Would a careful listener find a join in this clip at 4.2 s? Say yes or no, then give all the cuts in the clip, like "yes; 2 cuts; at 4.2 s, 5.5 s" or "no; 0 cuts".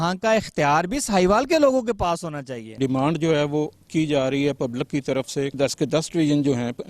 no; 2 cuts; at 2.8 s, 5.6 s